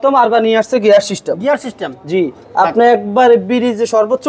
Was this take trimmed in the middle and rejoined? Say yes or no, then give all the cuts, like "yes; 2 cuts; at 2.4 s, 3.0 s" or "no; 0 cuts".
no; 0 cuts